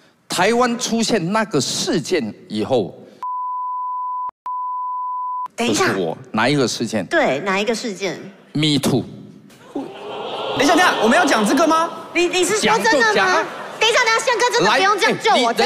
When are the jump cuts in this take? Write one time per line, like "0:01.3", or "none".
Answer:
none